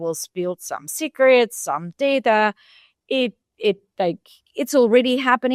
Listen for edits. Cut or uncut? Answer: uncut